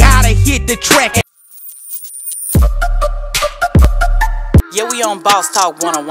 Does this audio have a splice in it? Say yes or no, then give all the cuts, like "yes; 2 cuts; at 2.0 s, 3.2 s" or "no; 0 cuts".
yes; 1 cut; at 1.3 s